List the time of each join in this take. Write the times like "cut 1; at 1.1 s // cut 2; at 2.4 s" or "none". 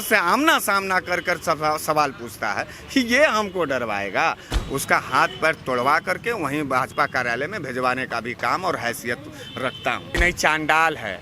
cut 1; at 4.5 s // cut 2; at 10.2 s

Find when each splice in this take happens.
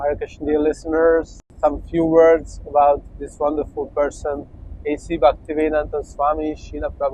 cut 1; at 1.4 s

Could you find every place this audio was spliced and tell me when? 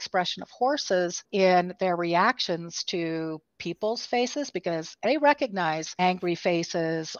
cut 1; at 1.2 s // cut 2; at 4.9 s // cut 3; at 5.9 s

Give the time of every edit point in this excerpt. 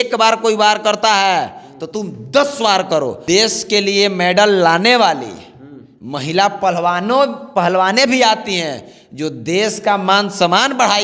cut 1; at 3.2 s

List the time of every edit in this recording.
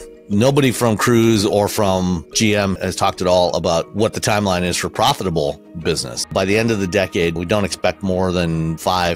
cut 1; at 6.1 s

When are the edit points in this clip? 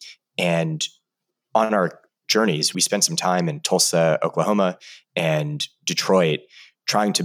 cut 1; at 2.7 s

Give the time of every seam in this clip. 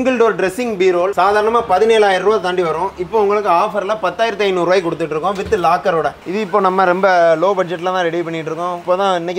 cut 1; at 1.1 s // cut 2; at 6.2 s

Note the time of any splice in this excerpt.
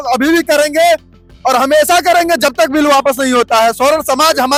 none

